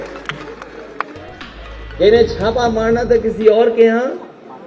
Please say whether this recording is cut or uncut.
uncut